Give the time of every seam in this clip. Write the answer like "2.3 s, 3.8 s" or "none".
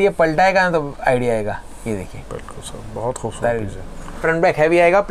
4.2 s